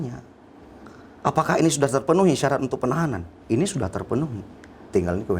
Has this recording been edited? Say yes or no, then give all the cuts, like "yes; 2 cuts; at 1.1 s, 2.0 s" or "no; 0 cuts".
yes; 1 cut; at 3.4 s